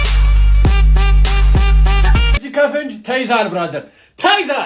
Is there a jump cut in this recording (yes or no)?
yes